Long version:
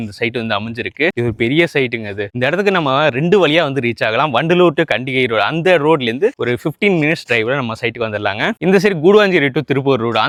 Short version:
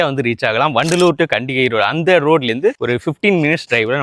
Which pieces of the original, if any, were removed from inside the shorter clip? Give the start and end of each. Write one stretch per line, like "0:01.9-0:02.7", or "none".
none